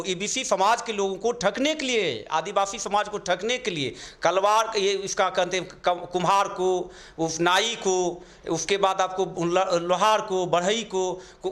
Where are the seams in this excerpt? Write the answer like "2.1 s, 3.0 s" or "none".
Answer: none

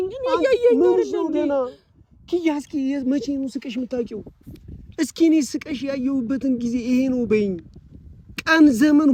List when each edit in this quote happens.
none

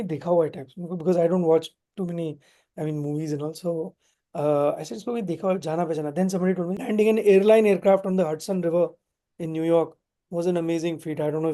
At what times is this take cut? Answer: 6.8 s

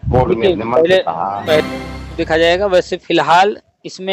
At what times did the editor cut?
1.6 s

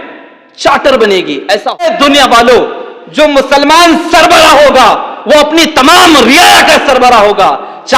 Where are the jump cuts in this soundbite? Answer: 1.8 s

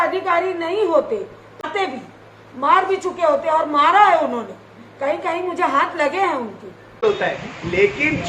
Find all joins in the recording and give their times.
1.6 s, 6.9 s

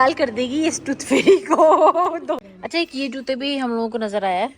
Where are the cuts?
2.4 s

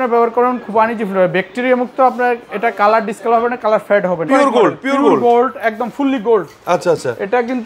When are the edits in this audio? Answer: 4.3 s

